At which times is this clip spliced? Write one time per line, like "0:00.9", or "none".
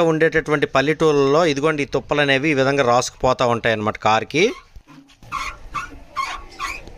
none